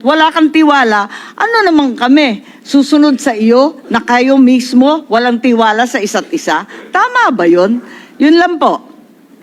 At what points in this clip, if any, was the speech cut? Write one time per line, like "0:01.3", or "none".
none